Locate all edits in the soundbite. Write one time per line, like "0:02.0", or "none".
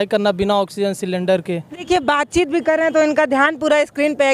0:01.8